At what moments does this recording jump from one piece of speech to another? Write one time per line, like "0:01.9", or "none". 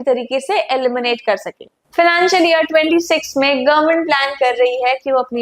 0:01.7